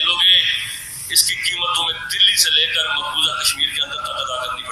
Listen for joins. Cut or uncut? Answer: uncut